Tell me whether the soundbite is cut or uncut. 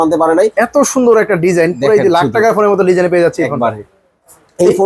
uncut